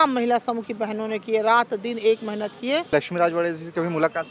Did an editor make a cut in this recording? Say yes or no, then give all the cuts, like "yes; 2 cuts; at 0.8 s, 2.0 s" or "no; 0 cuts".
yes; 1 cut; at 2.9 s